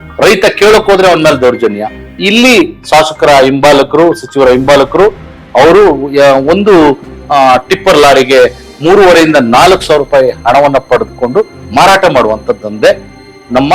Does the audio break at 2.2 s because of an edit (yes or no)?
yes